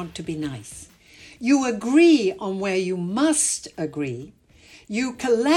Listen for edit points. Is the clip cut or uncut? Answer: uncut